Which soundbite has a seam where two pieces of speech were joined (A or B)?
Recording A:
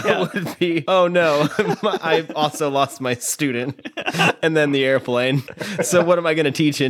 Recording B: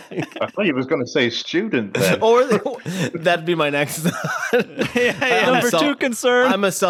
A